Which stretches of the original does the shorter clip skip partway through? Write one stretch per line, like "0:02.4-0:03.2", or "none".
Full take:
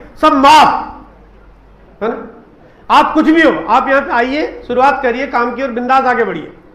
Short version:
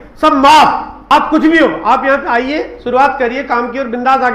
0:01.1-0:02.9